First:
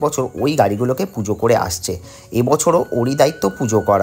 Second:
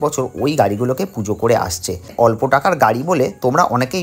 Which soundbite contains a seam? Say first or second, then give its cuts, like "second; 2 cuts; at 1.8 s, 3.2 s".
second; 1 cut; at 2.1 s